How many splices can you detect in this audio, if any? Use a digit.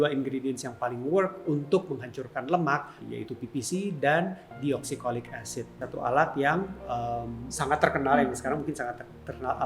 2